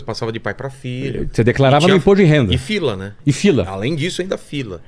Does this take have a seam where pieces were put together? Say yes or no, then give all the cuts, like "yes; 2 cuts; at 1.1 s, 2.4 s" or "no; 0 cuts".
no; 0 cuts